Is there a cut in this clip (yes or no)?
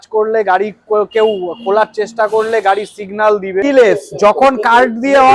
yes